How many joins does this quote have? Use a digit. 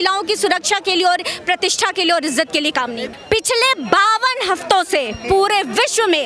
1